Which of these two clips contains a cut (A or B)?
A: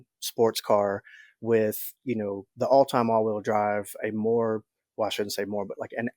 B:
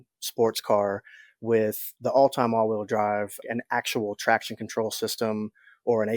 B